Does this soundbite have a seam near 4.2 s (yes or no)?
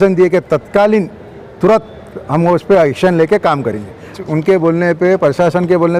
yes